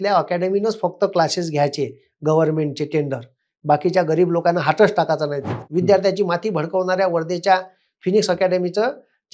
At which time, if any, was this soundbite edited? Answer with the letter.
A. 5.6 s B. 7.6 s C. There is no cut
A